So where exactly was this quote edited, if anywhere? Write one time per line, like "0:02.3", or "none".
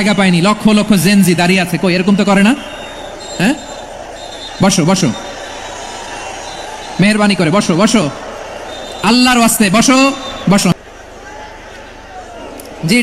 0:10.7